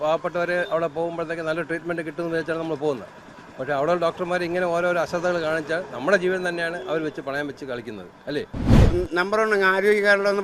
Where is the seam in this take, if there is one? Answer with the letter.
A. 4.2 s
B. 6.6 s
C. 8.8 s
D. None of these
C